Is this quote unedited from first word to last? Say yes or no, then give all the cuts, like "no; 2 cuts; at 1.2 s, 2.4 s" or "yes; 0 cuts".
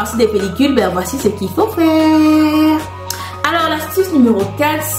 yes; 0 cuts